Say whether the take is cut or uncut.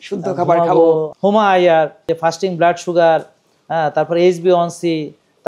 cut